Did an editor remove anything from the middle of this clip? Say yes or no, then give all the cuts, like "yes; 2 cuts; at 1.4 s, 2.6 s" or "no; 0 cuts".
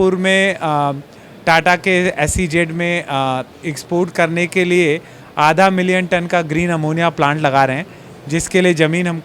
no; 0 cuts